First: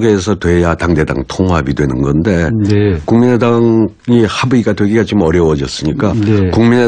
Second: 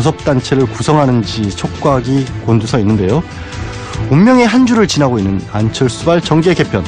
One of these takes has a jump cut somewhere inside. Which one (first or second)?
first